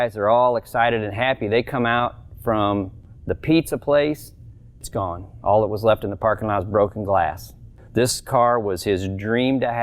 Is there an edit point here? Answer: yes; 2 cuts; at 4.9 s, 7.8 s

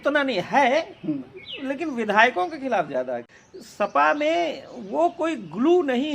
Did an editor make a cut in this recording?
yes; 1 cut; at 3.2 s

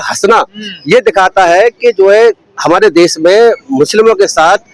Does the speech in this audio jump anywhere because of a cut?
no; 0 cuts

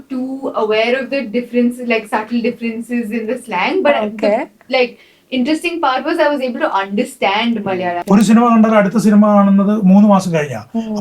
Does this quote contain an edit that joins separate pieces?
yes; 1 cut; at 8.0 s

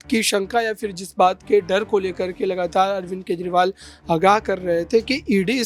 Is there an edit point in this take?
no; 0 cuts

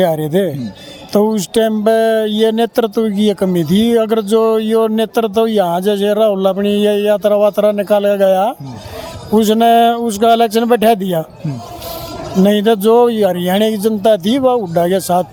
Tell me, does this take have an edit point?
no; 0 cuts

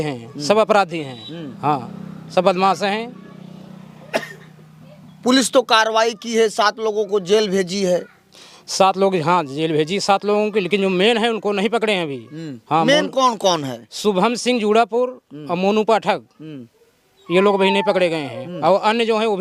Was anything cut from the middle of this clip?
no; 0 cuts

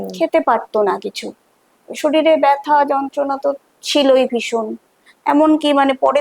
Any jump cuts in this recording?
no; 0 cuts

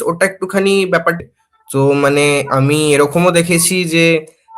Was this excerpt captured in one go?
no; 1 cut; at 1.2 s

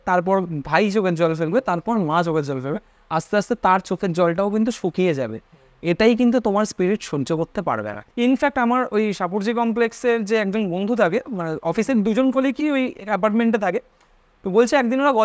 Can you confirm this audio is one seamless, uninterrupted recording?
no; 1 cut; at 8.0 s

